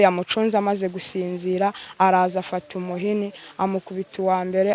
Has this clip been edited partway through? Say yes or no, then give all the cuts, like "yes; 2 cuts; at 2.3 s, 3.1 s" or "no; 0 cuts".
no; 0 cuts